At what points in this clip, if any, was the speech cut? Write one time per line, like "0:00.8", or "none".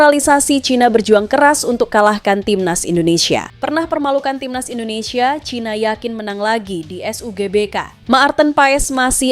0:03.5
0:07.9